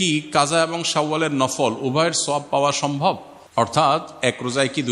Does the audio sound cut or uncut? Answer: cut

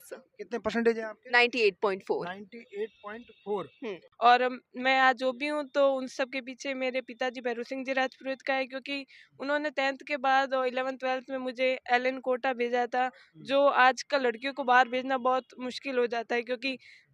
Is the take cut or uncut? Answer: cut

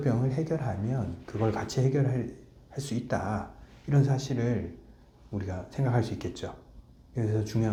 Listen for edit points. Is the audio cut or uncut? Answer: uncut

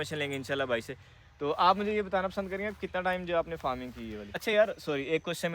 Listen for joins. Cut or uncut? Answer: cut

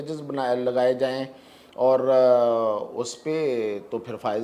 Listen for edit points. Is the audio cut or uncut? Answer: uncut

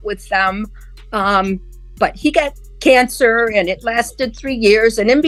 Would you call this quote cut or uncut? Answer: uncut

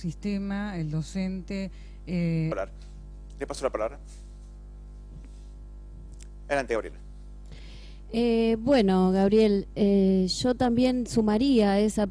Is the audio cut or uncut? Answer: uncut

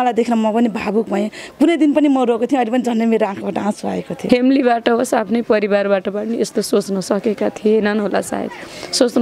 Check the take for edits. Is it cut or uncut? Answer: cut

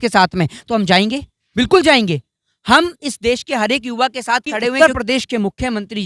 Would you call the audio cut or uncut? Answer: cut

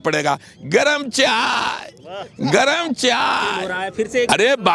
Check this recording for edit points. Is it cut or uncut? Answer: cut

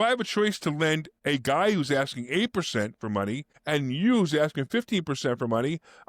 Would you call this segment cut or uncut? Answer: cut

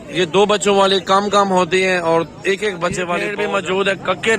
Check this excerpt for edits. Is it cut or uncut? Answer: cut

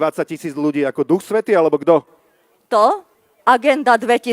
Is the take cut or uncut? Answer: uncut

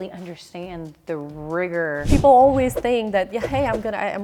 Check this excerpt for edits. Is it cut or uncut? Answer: cut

